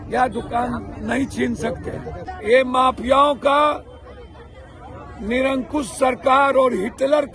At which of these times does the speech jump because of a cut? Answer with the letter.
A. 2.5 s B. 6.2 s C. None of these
A